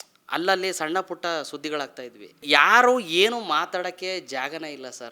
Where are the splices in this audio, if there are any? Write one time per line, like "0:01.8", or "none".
0:02.4